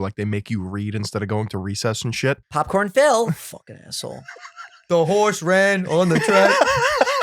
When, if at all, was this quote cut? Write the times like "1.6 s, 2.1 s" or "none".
2.4 s